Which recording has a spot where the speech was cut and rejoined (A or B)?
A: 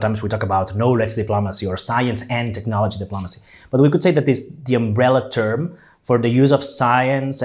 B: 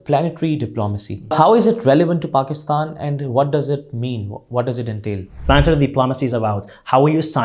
B